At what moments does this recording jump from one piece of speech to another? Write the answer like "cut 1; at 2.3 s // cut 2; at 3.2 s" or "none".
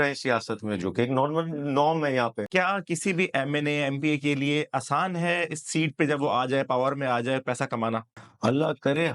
cut 1; at 2.5 s // cut 2; at 8.2 s